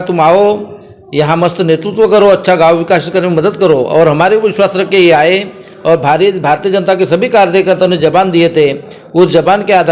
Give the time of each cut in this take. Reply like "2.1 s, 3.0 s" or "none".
none